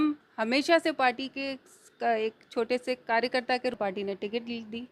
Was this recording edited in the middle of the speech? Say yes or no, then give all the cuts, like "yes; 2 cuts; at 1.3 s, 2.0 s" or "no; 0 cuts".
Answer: yes; 1 cut; at 3.8 s